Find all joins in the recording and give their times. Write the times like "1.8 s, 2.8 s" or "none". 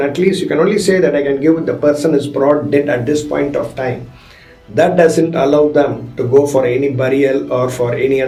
none